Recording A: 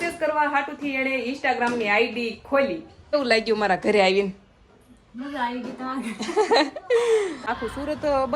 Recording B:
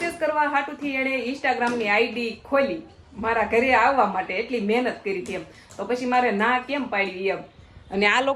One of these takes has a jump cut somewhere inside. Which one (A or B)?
A